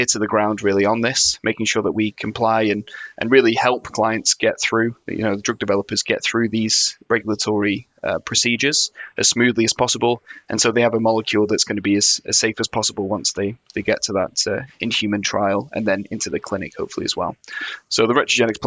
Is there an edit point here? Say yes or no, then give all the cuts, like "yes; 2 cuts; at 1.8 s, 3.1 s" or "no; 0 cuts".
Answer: yes; 1 cut; at 14.7 s